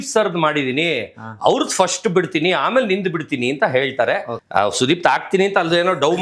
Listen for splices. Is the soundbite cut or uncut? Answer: cut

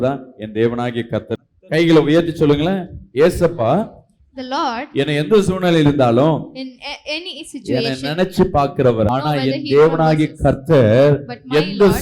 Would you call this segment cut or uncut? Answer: cut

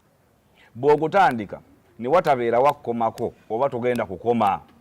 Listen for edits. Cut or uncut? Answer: uncut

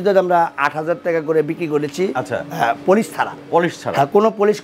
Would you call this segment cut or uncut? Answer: uncut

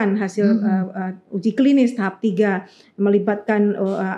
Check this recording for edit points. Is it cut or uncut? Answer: uncut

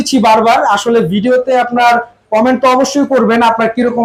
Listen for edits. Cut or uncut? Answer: uncut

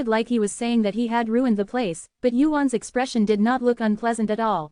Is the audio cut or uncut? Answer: uncut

